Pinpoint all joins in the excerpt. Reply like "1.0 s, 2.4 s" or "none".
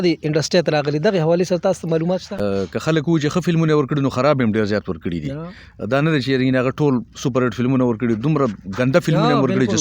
2.4 s